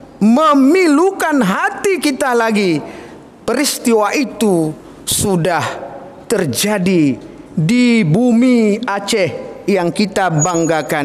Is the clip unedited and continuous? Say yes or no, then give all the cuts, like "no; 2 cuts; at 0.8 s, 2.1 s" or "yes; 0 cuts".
yes; 0 cuts